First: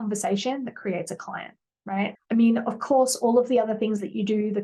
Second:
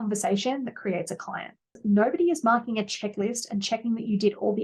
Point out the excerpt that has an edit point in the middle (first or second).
second